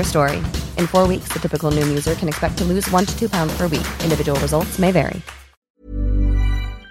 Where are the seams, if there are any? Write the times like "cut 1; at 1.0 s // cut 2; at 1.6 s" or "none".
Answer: cut 1; at 5.6 s